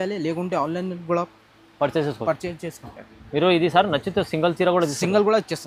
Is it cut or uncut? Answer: uncut